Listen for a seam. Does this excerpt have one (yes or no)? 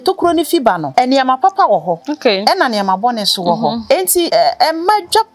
yes